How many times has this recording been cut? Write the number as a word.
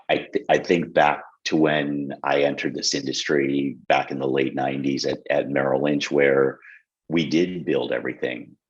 one